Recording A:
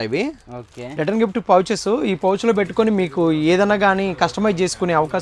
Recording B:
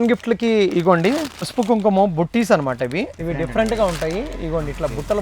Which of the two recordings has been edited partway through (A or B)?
B